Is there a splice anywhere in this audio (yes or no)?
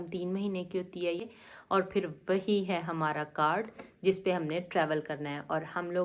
yes